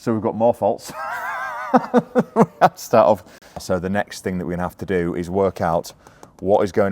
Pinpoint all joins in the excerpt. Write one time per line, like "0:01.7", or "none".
0:03.6